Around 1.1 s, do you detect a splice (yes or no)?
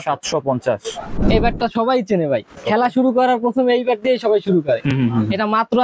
yes